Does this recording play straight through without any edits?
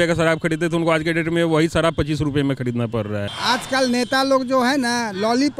no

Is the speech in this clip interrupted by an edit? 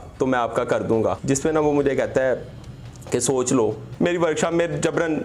yes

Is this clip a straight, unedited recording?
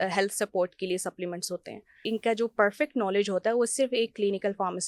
no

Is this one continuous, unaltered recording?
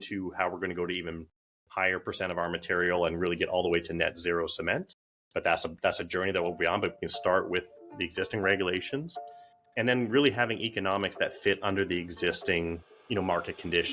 no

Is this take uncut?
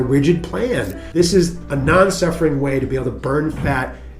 no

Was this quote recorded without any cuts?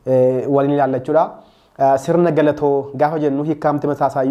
yes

